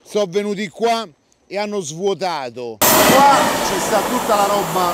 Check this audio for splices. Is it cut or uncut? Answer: cut